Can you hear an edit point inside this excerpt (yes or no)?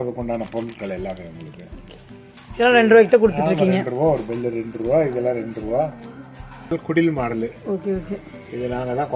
yes